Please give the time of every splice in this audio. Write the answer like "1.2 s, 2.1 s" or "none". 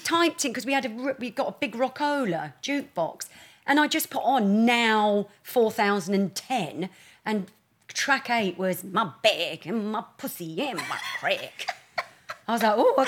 none